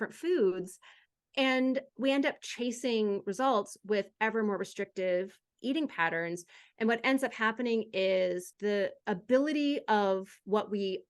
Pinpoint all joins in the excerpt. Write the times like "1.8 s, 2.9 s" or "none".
8.8 s